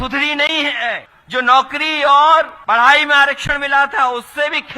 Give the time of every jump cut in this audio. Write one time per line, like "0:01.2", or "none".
0:01.1
0:02.6